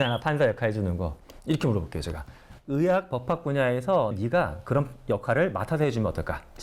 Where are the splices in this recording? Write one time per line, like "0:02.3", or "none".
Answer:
0:01.1
0:04.1